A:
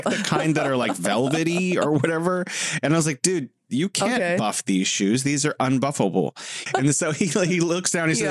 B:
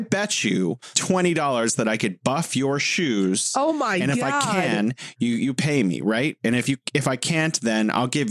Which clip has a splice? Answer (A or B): A